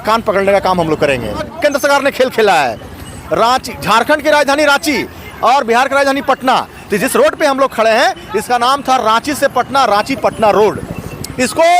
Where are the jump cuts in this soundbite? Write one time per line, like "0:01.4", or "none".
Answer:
0:01.5